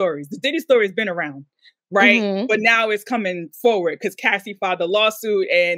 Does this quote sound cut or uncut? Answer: uncut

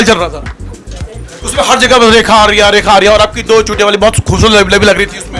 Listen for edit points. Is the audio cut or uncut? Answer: uncut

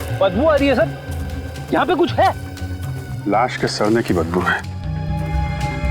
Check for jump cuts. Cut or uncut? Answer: uncut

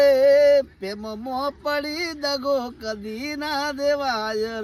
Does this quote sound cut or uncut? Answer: uncut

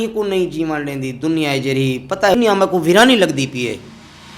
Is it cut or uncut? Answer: cut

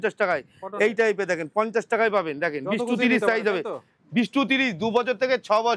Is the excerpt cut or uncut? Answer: uncut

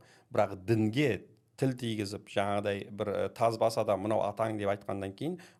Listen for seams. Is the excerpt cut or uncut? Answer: uncut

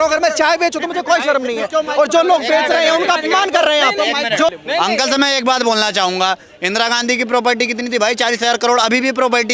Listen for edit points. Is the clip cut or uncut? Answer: cut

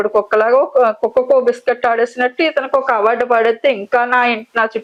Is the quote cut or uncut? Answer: uncut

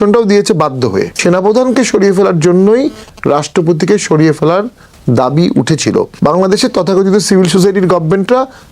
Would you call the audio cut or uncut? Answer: cut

